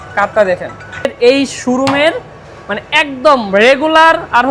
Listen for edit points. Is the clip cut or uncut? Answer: cut